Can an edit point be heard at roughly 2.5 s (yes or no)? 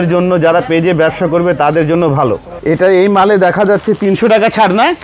yes